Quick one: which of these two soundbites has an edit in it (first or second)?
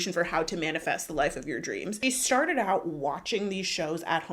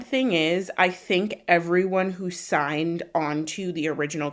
first